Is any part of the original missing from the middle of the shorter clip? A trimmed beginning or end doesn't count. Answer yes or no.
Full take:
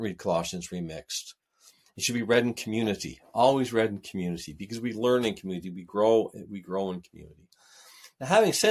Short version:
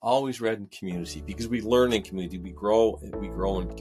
no